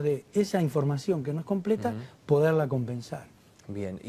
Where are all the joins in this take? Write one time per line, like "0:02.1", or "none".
none